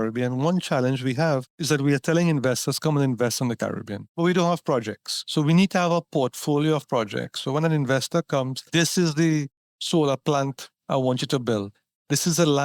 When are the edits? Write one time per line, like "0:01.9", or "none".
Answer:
none